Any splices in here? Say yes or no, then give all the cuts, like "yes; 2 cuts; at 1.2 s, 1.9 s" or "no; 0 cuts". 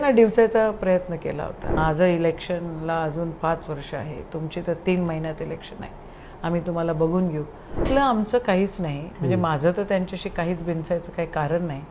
yes; 2 cuts; at 1.7 s, 7.8 s